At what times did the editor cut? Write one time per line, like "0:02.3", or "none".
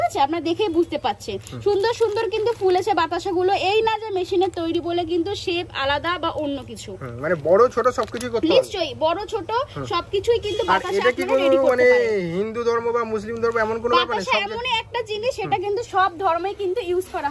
none